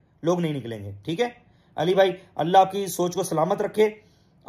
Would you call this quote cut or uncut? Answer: uncut